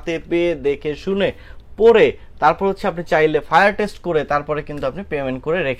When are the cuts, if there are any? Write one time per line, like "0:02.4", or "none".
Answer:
none